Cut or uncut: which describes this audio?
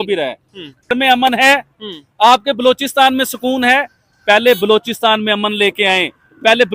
cut